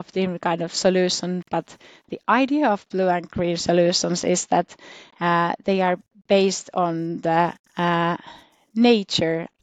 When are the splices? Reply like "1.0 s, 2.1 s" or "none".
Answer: none